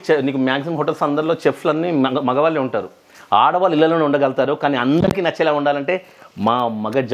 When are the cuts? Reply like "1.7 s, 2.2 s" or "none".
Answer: none